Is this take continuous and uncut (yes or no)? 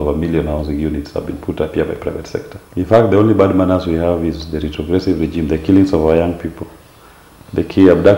no